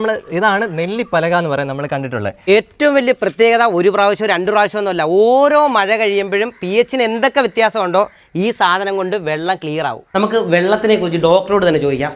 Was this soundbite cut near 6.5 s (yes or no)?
no